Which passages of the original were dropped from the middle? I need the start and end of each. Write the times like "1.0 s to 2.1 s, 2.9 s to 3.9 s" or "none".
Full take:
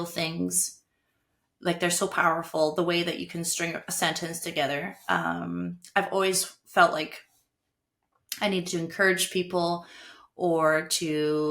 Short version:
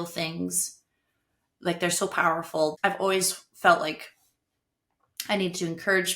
2.7 s to 5.9 s